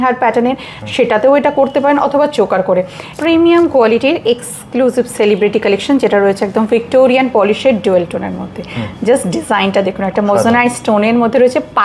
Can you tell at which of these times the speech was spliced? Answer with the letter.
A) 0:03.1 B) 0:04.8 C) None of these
A